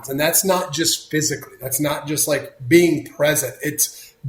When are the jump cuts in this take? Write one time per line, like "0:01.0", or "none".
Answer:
none